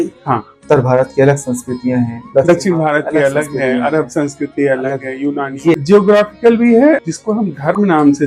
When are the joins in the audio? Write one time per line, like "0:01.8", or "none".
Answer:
0:07.0